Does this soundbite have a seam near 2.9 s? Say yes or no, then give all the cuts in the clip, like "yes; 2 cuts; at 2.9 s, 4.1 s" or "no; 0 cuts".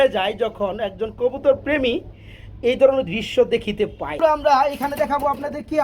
no; 1 cut; at 4.2 s